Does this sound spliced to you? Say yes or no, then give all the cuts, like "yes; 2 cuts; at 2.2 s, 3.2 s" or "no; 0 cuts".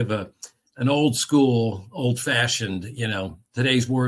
no; 0 cuts